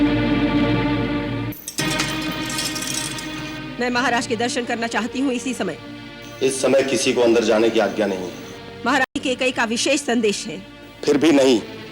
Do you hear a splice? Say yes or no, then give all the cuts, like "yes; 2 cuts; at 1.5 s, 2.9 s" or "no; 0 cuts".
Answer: yes; 1 cut; at 1.5 s